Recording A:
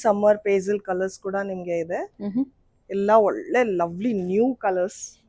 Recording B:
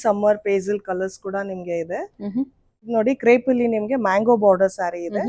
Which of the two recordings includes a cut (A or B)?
B